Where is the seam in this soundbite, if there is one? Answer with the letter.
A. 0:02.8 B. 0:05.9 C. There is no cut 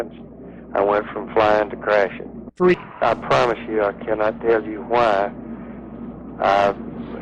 A